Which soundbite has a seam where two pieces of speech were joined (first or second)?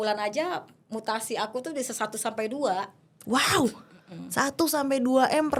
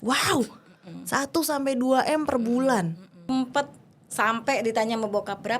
second